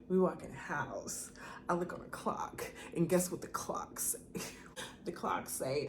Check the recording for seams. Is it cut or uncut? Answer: cut